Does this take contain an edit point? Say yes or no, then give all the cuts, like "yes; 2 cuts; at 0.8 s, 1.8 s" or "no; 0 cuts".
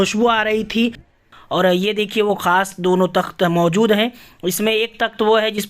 yes; 1 cut; at 1.1 s